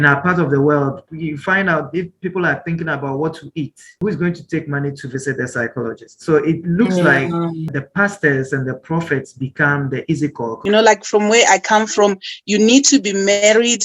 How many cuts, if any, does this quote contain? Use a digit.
4